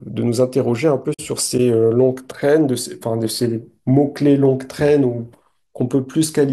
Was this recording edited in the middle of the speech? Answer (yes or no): no